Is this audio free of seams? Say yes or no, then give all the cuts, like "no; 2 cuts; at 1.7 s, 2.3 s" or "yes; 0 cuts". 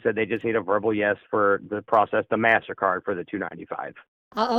yes; 0 cuts